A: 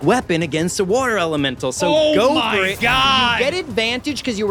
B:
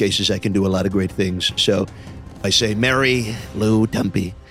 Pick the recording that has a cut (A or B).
B